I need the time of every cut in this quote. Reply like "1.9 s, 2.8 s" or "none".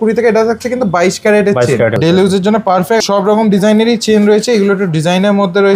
1.9 s, 3.0 s